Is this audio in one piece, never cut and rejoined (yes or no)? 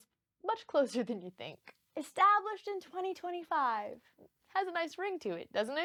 yes